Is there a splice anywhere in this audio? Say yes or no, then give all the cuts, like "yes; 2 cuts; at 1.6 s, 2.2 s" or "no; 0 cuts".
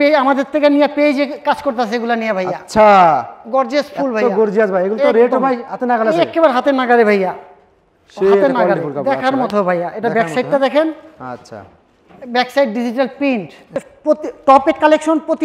yes; 1 cut; at 13.8 s